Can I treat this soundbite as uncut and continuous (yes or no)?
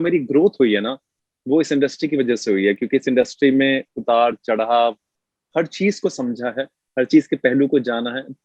yes